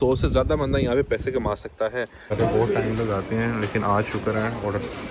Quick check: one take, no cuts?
no; 1 cut; at 2.3 s

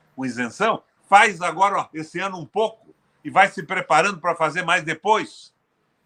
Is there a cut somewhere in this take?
no; 0 cuts

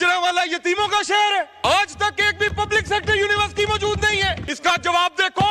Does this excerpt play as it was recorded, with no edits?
no; 2 cuts; at 1.5 s, 4.5 s

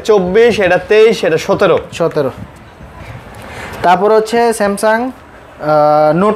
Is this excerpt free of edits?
yes; 0 cuts

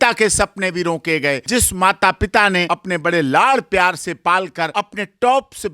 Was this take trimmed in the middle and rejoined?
yes; 3 cuts; at 1.4 s, 2.6 s, 4.7 s

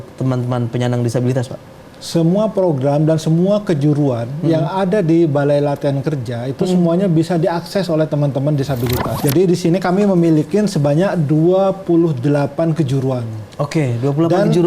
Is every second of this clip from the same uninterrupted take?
no; 1 cut; at 9.1 s

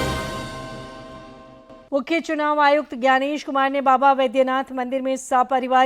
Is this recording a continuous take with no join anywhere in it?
no; 1 cut; at 1.2 s

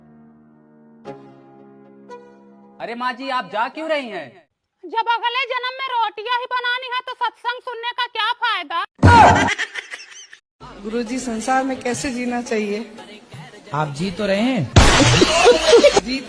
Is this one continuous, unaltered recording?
no; 1 cut; at 10.4 s

